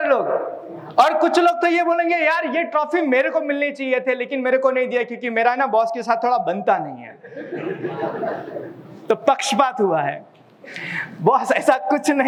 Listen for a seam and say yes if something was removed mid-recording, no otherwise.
no